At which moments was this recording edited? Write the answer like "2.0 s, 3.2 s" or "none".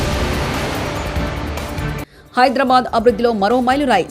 2.1 s

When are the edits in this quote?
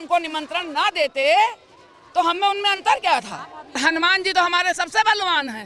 3.8 s

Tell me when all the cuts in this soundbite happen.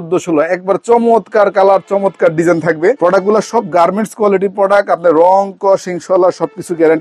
none

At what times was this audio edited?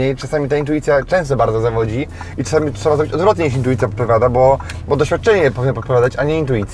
none

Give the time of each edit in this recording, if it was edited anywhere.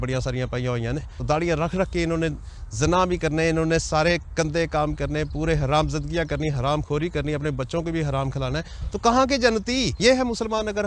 1.2 s, 10.0 s

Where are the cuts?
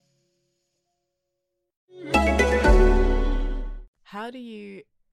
none

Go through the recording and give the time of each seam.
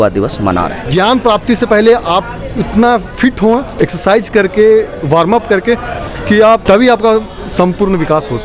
0.8 s, 3.7 s, 6.6 s

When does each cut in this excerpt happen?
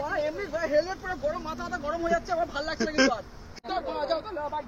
3.5 s

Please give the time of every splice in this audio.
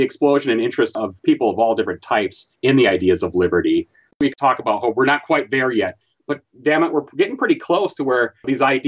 0.9 s, 2.4 s, 4.2 s

